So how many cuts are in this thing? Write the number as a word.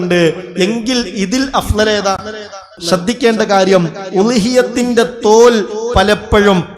one